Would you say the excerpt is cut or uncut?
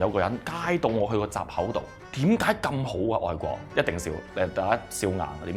cut